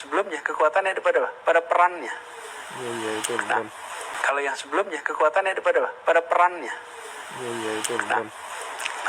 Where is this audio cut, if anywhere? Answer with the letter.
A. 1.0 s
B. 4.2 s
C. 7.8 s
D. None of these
B